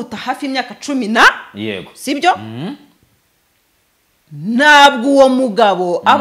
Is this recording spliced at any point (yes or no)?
no